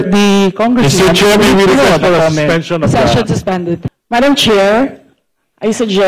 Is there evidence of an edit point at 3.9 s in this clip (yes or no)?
yes